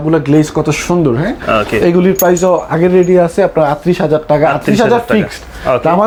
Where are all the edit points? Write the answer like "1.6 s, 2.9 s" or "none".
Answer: none